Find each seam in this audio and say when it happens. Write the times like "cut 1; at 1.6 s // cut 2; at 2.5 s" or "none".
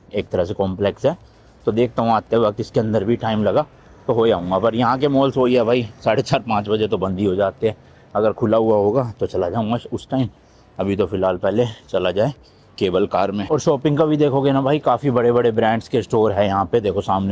none